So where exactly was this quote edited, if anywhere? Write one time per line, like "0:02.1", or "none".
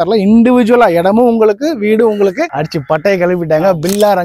0:02.5

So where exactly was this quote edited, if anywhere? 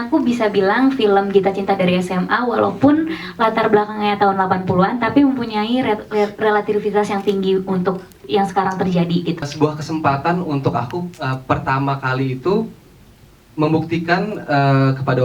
0:09.5

